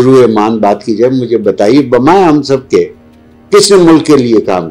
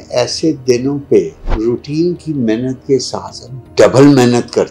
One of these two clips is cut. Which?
second; 1 cut; at 1.4 s

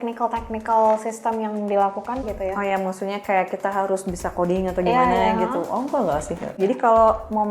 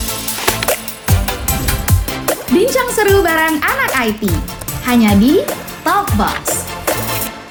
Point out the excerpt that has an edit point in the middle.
first; 2 cuts; at 2.2 s, 6.5 s

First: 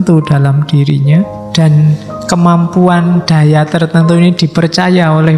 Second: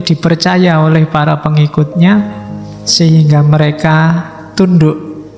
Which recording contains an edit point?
first; 1 cut; at 1.4 s

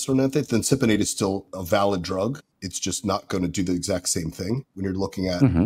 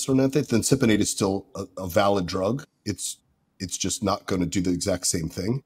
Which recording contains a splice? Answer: first; 3 cuts; at 1.5 s, 2.5 s, 4.7 s

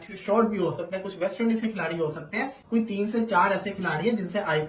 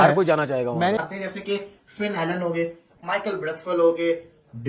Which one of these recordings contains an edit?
second; 1 cut; at 1.0 s

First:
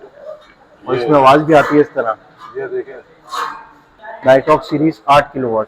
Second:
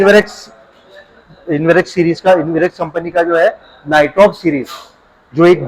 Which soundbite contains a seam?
first; 1 cut; at 3.9 s

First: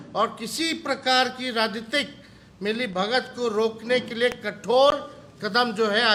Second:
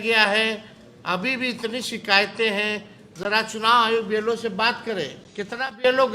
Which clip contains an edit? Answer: second; 1 cut; at 5.2 s

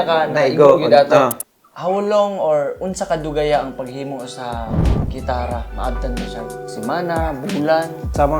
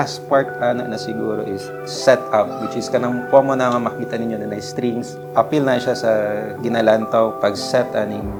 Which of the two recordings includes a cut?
first; 1 cut; at 1.5 s

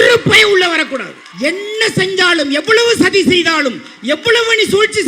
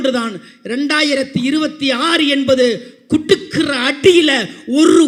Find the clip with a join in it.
first; 1 cut; at 1.2 s

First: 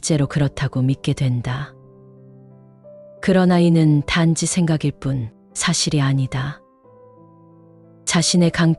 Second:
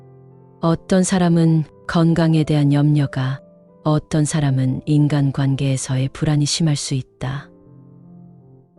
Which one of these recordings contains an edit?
second; 1 cut; at 7.5 s

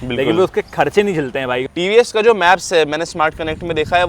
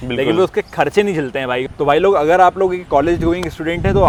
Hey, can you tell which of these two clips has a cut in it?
first; 1 cut; at 1.7 s

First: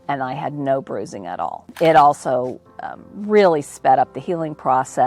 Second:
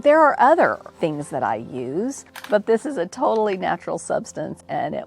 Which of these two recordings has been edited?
second; 1 cut; at 2.4 s

